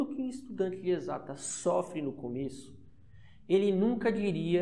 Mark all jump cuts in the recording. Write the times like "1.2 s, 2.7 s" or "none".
none